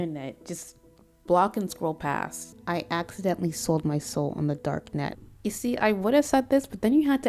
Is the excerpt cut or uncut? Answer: cut